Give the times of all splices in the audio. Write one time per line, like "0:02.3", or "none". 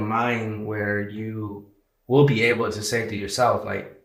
none